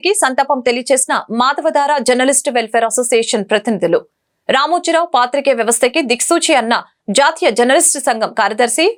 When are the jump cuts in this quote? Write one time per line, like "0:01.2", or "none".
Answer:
none